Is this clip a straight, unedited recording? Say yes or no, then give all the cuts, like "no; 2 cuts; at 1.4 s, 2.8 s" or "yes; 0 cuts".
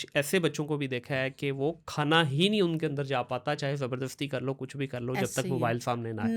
yes; 0 cuts